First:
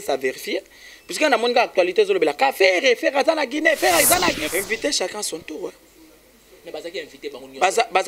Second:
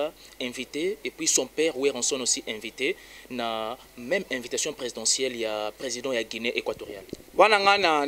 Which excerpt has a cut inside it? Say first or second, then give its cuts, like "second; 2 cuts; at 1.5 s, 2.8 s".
first; 1 cut; at 4.4 s